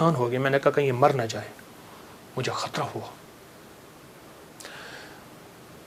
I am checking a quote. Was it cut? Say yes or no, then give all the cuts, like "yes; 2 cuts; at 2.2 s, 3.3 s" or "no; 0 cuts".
no; 0 cuts